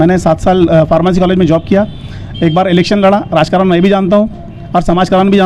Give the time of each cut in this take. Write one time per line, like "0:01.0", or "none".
none